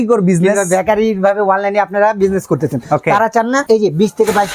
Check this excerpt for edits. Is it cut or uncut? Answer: cut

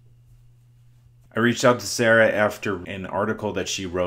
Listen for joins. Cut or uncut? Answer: cut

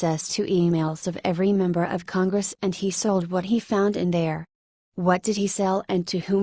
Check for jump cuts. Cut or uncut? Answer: cut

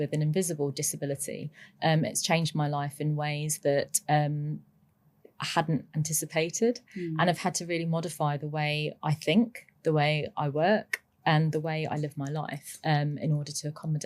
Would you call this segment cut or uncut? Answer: uncut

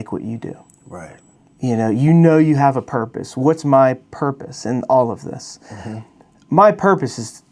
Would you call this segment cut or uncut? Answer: uncut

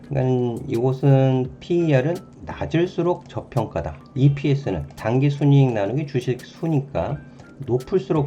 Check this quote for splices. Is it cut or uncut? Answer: cut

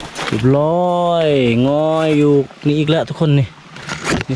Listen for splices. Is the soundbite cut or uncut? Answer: uncut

